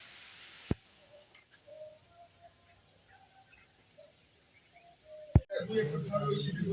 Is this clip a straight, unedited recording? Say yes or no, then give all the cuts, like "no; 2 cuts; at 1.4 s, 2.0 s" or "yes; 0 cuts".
no; 1 cut; at 5.7 s